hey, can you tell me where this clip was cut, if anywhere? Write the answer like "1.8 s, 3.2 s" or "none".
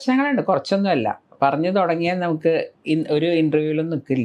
none